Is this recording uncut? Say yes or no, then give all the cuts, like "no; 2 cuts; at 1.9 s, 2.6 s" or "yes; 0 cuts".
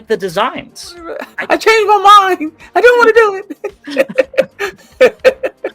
no; 1 cut; at 1.3 s